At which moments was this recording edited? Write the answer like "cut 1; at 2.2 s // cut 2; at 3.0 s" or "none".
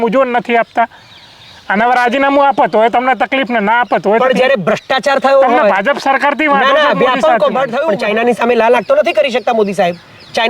cut 1; at 7.8 s